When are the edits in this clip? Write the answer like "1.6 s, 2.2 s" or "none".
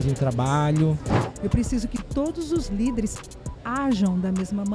1.3 s